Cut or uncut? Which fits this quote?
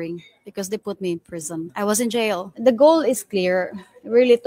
cut